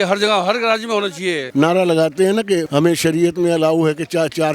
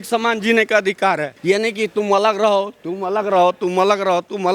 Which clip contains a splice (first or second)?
first